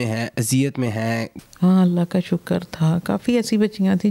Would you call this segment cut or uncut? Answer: cut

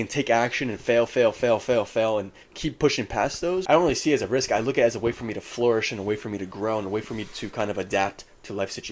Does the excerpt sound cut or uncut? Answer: cut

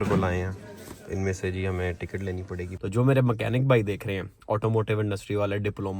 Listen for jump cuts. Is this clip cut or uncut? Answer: cut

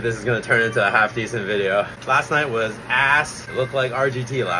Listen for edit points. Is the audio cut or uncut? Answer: cut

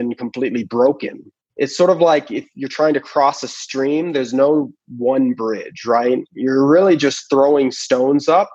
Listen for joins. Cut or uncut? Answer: cut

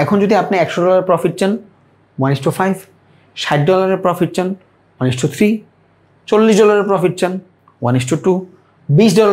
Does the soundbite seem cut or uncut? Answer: uncut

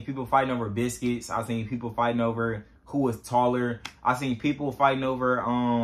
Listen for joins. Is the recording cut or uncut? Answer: uncut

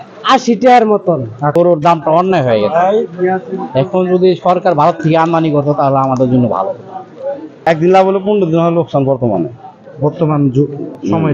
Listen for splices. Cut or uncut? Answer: cut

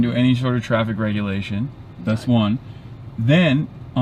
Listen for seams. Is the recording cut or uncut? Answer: uncut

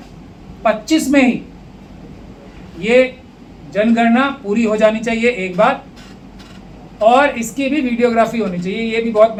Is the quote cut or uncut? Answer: uncut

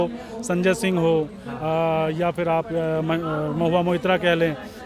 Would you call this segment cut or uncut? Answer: uncut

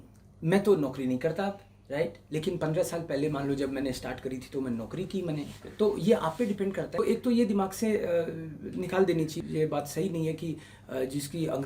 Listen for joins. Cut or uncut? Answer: cut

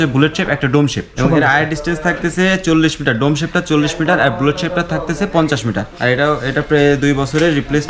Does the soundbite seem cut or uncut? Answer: cut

